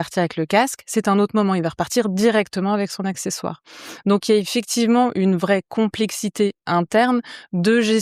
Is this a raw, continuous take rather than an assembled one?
yes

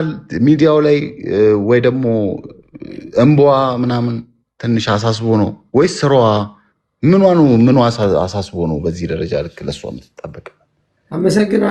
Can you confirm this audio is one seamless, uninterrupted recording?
yes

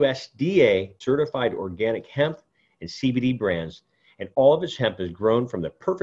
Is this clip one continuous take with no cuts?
no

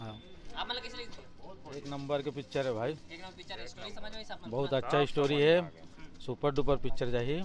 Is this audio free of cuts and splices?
yes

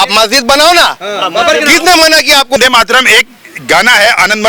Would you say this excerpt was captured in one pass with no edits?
no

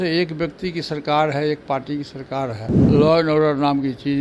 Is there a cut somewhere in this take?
yes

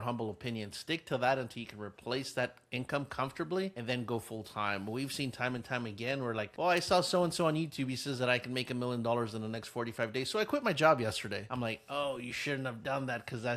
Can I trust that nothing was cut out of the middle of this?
no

